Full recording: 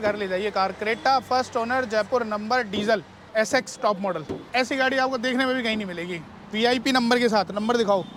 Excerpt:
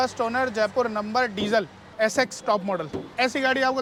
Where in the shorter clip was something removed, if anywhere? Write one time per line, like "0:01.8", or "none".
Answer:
none